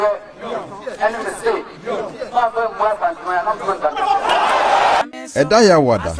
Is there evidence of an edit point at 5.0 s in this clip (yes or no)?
yes